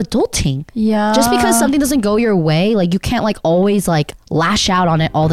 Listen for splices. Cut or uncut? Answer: uncut